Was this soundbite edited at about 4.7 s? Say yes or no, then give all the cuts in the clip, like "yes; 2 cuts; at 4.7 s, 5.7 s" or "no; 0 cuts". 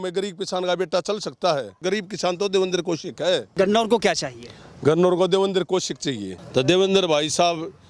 no; 3 cuts; at 1.8 s, 3.5 s, 6.3 s